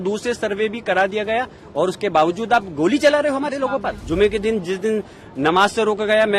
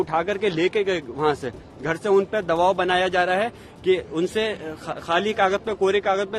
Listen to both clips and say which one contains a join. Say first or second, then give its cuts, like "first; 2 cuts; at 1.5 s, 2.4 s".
first; 1 cut; at 4.0 s